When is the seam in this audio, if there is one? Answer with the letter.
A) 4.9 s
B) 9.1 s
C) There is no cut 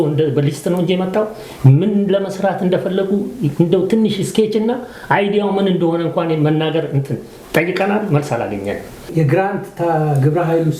B